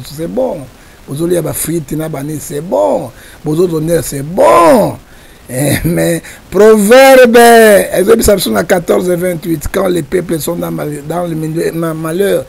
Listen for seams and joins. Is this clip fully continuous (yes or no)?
yes